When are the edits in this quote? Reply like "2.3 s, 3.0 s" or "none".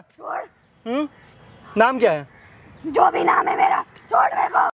none